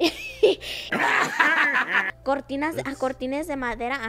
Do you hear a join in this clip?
yes; 1 cut; at 2.1 s

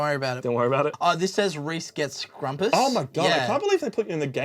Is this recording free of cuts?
no; 1 cut; at 0.9 s

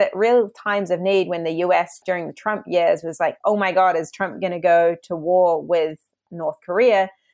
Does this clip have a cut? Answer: yes; 1 cut; at 2.0 s

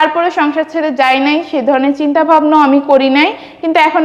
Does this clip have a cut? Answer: no; 0 cuts

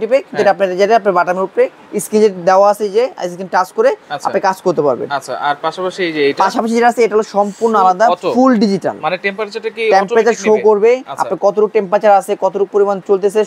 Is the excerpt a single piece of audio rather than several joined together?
yes; 0 cuts

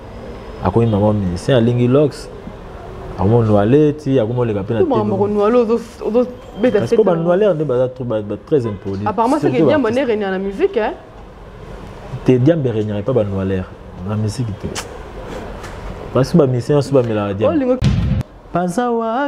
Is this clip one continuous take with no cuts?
no; 1 cut; at 17.8 s

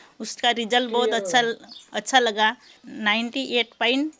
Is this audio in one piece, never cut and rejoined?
yes; 0 cuts

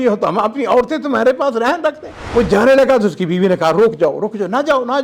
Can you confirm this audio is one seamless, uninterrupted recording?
no; 1 cut; at 2.1 s

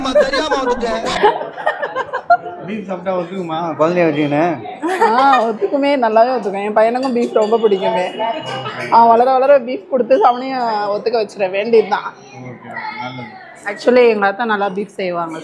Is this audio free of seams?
yes; 0 cuts

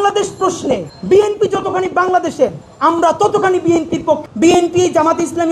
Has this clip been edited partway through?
yes; 1 cut; at 4.2 s

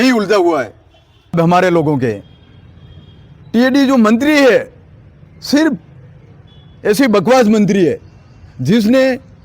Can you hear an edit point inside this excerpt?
yes; 1 cut; at 1.4 s

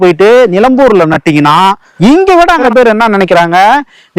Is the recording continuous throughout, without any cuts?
no; 2 cuts; at 1.9 s, 2.6 s

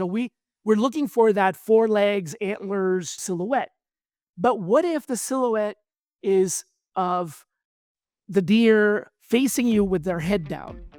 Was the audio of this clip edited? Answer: no; 0 cuts

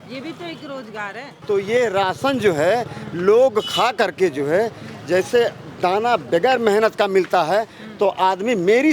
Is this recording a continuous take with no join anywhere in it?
no; 1 cut; at 1.3 s

